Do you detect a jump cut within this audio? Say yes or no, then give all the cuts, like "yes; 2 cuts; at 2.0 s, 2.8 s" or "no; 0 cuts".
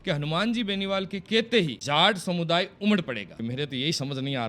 yes; 2 cuts; at 1.8 s, 3.3 s